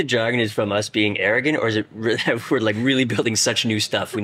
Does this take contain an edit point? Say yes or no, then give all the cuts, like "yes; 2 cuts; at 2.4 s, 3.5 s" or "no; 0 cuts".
no; 0 cuts